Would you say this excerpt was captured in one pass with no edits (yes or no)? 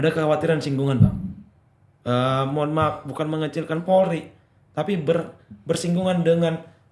yes